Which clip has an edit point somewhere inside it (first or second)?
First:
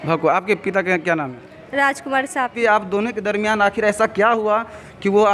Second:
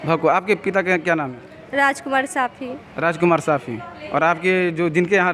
first